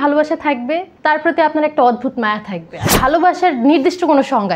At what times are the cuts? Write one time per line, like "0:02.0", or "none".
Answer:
0:00.9
0:02.8